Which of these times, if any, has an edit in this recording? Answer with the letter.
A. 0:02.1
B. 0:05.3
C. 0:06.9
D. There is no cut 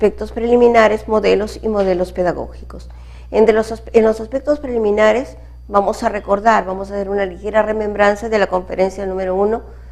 A